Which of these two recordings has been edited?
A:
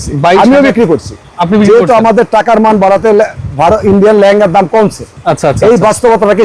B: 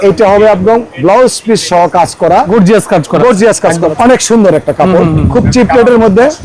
B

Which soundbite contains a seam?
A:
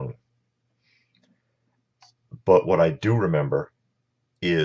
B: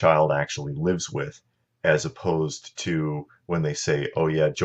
A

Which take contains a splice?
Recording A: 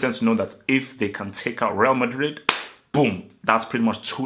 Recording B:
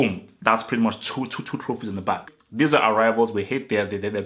B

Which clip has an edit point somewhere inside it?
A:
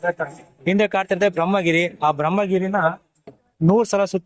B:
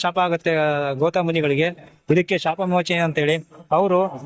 B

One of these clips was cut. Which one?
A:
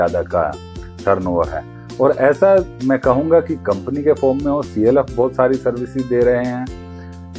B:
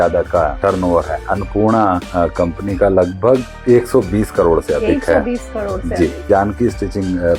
B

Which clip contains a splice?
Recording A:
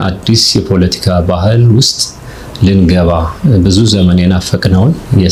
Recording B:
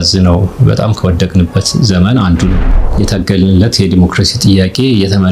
B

